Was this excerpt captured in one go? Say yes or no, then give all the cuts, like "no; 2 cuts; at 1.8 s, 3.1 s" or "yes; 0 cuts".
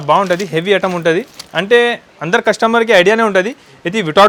yes; 0 cuts